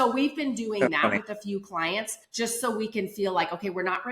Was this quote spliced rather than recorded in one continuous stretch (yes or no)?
yes